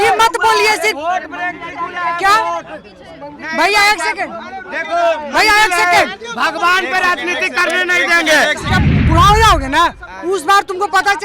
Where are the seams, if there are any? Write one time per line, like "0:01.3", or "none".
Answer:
0:08.7